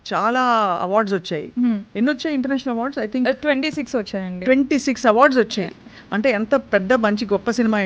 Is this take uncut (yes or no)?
yes